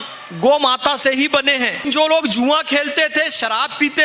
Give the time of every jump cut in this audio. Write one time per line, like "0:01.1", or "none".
0:01.8

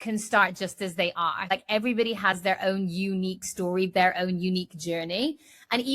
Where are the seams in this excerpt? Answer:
0:01.5

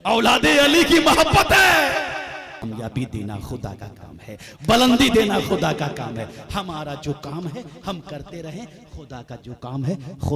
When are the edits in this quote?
0:02.6

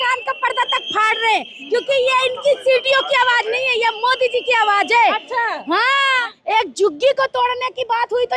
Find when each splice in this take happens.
0:06.1

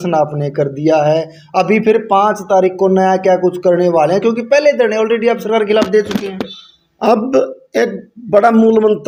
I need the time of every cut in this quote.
none

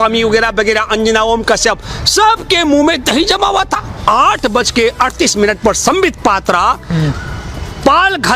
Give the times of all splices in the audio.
0:03.9

